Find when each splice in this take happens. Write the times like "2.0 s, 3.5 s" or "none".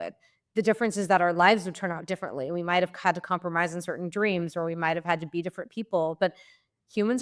none